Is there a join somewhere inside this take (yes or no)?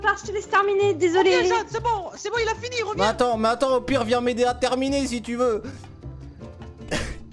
no